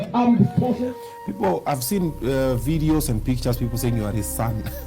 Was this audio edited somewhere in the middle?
yes; 1 cut; at 0.9 s

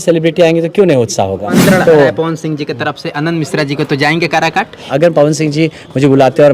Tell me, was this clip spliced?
yes; 2 cuts; at 1.6 s, 5.0 s

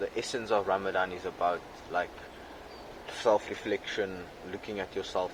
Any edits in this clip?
no; 0 cuts

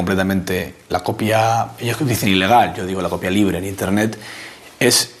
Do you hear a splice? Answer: no; 0 cuts

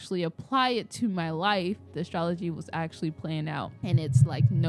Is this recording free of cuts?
no; 2 cuts; at 1.9 s, 3.7 s

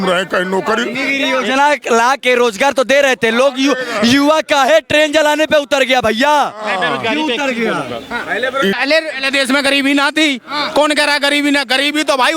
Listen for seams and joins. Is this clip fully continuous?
no; 1 cut; at 8.8 s

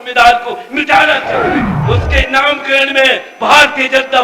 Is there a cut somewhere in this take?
yes; 1 cut; at 1.7 s

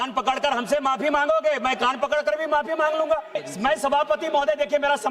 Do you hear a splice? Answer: yes; 1 cut; at 3.5 s

